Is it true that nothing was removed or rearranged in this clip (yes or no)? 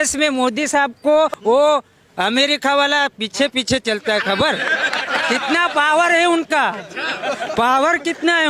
no